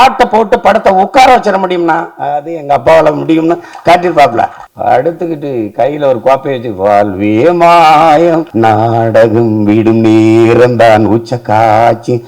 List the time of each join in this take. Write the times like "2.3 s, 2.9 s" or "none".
4.6 s, 8.5 s